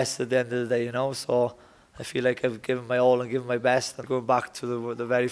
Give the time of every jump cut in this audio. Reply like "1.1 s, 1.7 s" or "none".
4.0 s